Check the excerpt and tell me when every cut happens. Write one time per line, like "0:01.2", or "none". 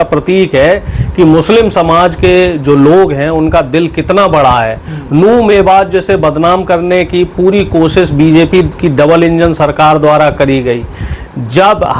none